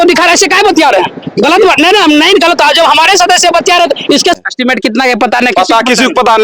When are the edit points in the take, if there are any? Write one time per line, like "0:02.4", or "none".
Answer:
0:04.4